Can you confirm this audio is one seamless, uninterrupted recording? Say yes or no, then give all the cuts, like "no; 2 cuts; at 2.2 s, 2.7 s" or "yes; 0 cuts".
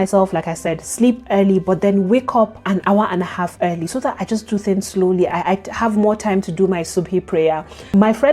yes; 0 cuts